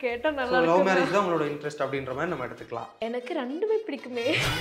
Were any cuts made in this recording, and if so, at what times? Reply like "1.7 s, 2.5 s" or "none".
2.9 s